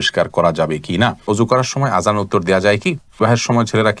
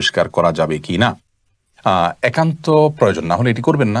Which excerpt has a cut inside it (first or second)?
first